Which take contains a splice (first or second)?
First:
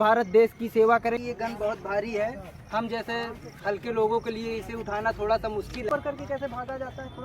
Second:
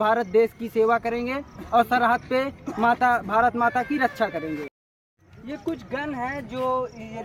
first